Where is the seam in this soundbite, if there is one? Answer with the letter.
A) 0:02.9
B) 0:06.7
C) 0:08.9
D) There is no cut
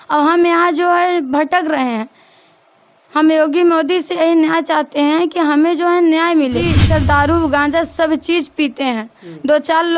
B